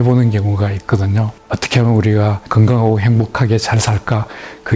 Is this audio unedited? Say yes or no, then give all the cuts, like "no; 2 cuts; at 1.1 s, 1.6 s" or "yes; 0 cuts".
no; 1 cut; at 1.4 s